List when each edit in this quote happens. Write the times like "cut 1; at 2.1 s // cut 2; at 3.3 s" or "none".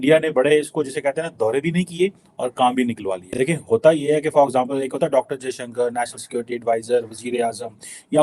none

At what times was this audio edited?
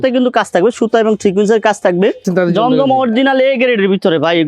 cut 1; at 2.2 s

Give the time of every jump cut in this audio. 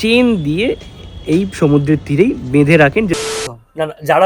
cut 1; at 3.2 s

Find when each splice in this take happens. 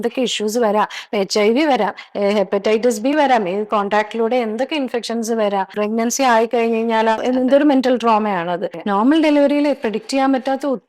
cut 1; at 5.7 s // cut 2; at 7.2 s // cut 3; at 8.7 s

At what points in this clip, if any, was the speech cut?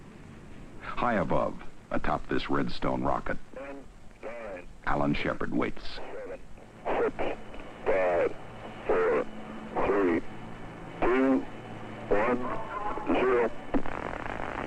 cut 1; at 7.3 s

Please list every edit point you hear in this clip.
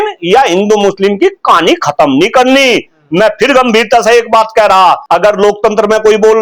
cut 1; at 5.0 s

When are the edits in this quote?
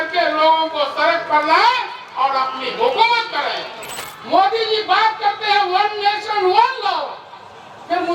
cut 1; at 4.0 s

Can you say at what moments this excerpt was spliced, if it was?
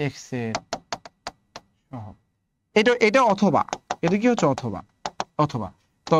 none

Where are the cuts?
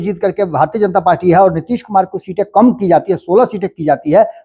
none

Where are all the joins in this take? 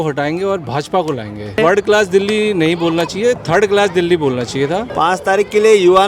cut 1; at 1.6 s // cut 2; at 4.9 s

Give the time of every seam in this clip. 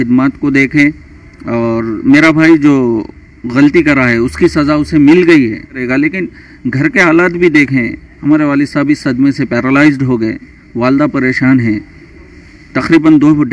cut 1; at 5.8 s

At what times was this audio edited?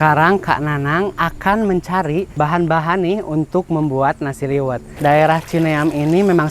cut 1; at 2.3 s // cut 2; at 4.8 s

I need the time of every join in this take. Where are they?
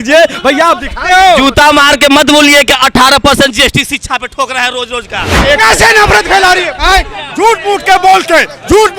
cut 1; at 5.4 s

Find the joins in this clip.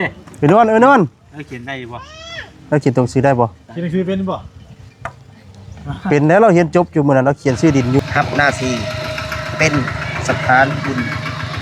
cut 1; at 8.0 s

